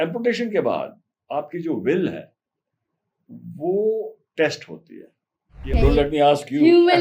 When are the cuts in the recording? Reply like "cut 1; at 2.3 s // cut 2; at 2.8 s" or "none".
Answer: cut 1; at 5.7 s